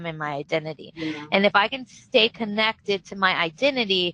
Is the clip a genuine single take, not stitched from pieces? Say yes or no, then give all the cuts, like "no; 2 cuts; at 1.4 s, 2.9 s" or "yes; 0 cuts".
yes; 0 cuts